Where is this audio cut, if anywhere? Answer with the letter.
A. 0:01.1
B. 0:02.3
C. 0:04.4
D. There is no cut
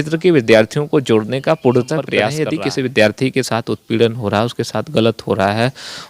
B